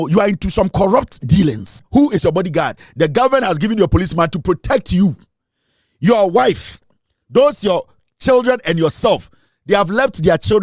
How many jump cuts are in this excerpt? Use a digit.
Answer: 1